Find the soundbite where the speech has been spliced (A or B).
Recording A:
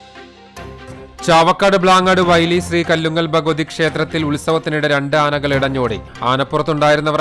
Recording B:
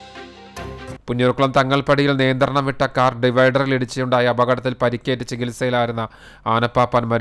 A